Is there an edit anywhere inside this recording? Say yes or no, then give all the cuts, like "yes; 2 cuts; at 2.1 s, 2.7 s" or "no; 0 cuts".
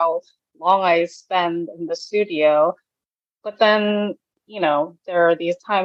no; 0 cuts